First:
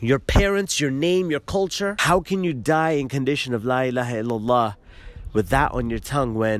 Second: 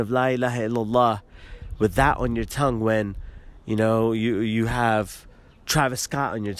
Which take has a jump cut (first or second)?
first